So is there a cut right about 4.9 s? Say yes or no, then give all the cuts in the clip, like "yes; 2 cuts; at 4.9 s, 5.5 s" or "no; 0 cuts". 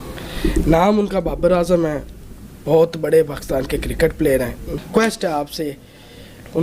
yes; 1 cut; at 4.9 s